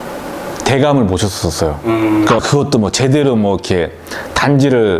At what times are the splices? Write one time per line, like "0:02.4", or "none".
0:02.4